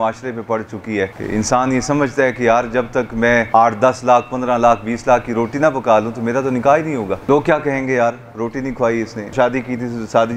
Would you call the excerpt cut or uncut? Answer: cut